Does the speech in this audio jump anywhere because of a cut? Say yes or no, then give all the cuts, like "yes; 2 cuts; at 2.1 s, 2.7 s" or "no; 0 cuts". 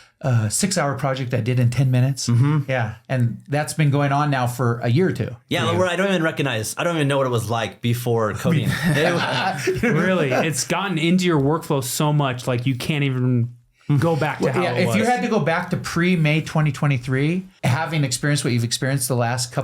yes; 1 cut; at 17.5 s